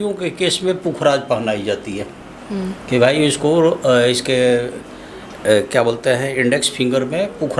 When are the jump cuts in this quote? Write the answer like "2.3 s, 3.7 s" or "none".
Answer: none